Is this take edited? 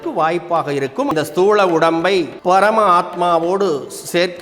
yes; 2 cuts; at 1.1 s, 2.3 s

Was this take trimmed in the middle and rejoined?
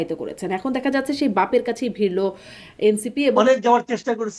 yes; 1 cut; at 3.4 s

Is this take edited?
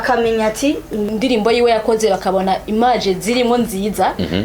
yes; 1 cut; at 1.1 s

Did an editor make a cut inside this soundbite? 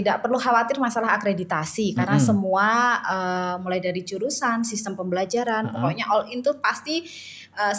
no; 0 cuts

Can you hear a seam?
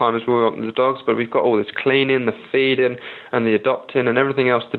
no; 0 cuts

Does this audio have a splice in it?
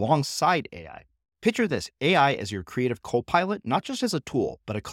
no; 0 cuts

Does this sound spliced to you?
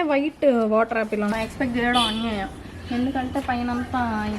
yes; 1 cut; at 1.3 s

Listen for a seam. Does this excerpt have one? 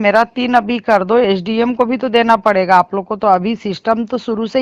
no; 0 cuts

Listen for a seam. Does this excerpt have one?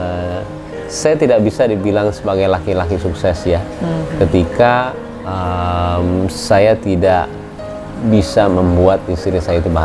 no; 0 cuts

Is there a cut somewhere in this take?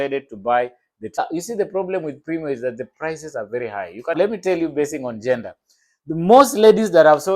yes; 2 cuts; at 1.2 s, 4.2 s

